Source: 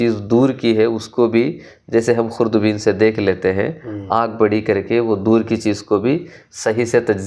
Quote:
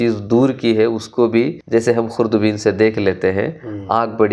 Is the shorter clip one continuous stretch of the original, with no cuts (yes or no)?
no